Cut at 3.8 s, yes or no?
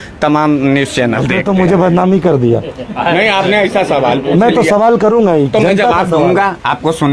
no